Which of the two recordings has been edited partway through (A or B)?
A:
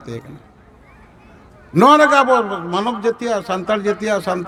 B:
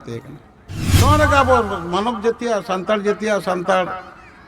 B